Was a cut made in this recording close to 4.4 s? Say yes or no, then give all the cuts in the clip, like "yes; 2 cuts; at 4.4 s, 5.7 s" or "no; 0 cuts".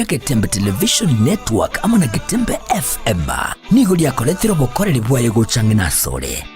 yes; 1 cut; at 4.4 s